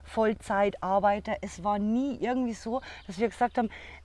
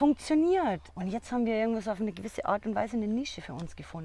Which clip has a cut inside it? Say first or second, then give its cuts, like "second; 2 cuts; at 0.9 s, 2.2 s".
second; 1 cut; at 0.9 s